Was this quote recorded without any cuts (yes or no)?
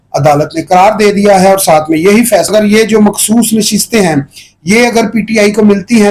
no